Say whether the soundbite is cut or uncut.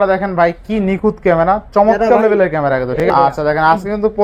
cut